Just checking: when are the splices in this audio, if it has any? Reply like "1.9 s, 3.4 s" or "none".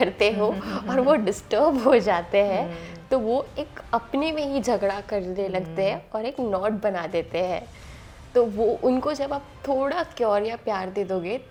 none